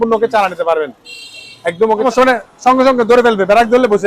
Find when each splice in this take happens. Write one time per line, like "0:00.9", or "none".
0:02.0

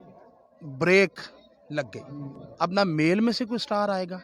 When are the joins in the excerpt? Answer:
0:02.4

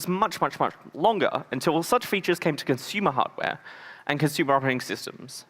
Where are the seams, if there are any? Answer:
0:01.9

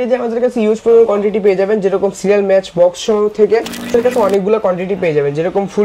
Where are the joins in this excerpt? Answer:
0:04.0

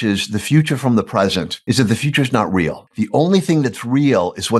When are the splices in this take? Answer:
0:01.5
0:02.8

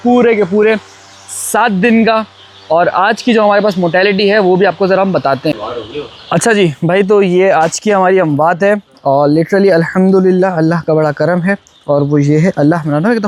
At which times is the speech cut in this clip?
none

